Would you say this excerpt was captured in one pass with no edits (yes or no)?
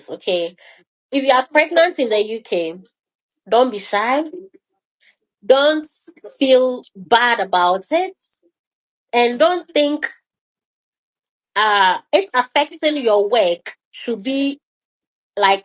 yes